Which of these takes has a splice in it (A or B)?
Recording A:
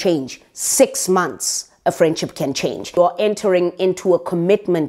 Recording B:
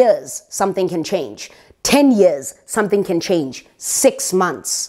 A